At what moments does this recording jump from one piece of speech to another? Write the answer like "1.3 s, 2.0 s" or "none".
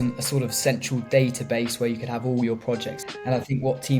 2.9 s